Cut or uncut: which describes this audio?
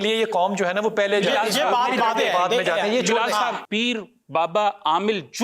cut